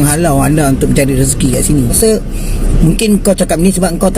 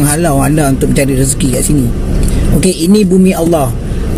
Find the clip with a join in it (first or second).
first